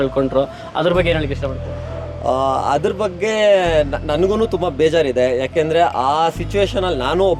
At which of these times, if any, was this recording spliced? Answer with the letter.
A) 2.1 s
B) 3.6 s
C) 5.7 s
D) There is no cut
D